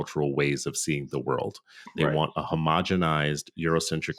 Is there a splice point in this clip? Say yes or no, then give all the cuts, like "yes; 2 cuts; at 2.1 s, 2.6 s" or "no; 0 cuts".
no; 0 cuts